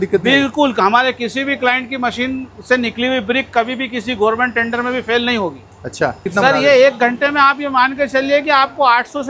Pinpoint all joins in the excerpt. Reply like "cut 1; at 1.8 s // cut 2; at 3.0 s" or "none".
cut 1; at 6.3 s